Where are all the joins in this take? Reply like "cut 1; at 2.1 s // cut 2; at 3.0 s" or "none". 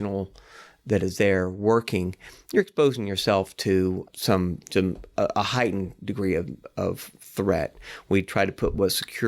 none

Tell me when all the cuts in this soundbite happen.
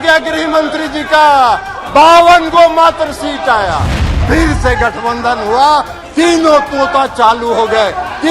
cut 1; at 4.1 s

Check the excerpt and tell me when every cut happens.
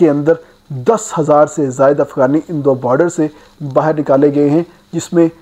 none

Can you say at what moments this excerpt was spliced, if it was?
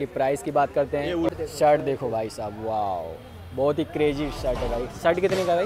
cut 1; at 1.3 s

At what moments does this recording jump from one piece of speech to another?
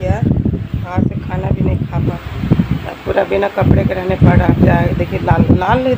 cut 1; at 2.1 s

